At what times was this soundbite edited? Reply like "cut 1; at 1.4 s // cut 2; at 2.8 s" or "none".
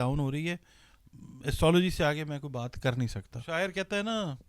cut 1; at 3.3 s